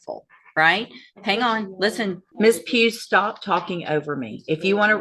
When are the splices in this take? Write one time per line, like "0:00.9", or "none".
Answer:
0:02.2